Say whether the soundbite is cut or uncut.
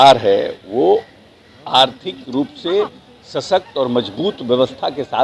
uncut